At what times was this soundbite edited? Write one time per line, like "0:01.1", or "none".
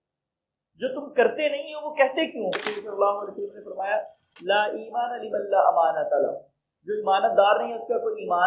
0:02.7